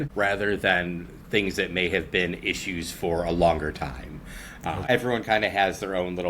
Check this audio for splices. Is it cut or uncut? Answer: cut